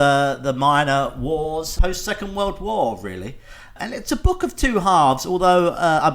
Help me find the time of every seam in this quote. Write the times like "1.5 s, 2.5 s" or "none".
1.7 s, 3.8 s